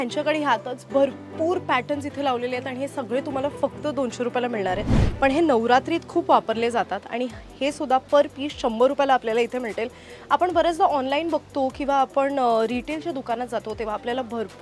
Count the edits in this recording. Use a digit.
1